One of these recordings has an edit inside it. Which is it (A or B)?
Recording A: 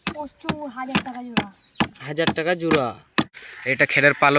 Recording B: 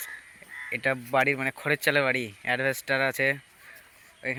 A